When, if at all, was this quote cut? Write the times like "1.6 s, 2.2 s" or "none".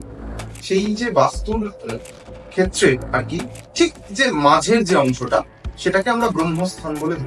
none